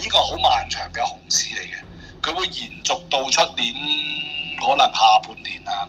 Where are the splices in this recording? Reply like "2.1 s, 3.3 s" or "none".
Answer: none